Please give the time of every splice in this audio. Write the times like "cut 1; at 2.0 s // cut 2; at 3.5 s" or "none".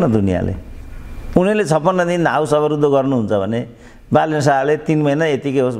none